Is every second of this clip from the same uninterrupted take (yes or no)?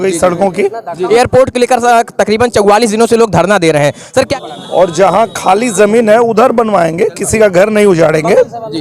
no